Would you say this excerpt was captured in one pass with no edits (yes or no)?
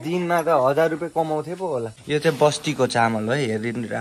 no